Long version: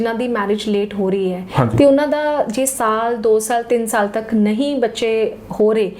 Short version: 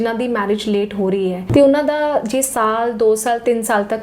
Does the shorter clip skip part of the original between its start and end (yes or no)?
yes